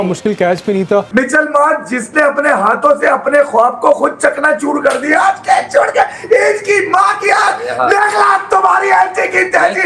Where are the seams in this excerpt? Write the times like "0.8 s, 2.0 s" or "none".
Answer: 1.1 s